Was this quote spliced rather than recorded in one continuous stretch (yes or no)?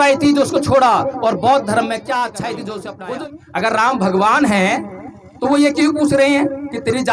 yes